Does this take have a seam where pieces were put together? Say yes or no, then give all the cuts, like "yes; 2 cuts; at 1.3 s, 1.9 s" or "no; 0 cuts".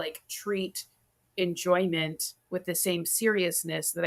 no; 0 cuts